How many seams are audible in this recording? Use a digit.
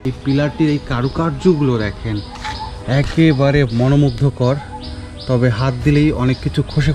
0